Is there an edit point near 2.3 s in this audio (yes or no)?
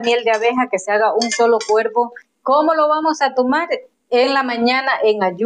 yes